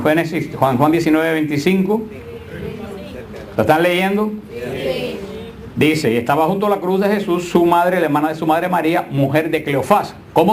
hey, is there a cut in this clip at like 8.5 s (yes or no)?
no